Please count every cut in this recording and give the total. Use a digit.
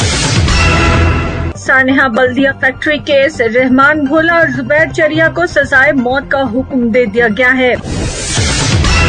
2